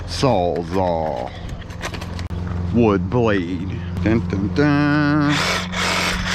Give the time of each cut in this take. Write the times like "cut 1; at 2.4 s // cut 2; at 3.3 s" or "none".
cut 1; at 2.3 s // cut 2; at 3.9 s